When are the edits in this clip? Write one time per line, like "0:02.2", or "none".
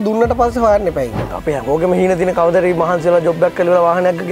0:01.4